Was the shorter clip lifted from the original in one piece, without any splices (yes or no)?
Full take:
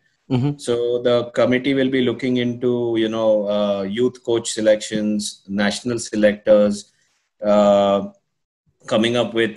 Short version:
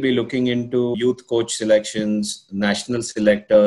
no